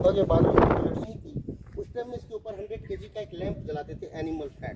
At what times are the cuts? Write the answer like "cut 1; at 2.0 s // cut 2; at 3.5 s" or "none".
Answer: cut 1; at 1.0 s